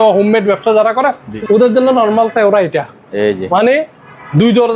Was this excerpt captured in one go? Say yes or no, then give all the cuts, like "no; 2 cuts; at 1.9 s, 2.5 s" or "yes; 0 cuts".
no; 1 cut; at 1.3 s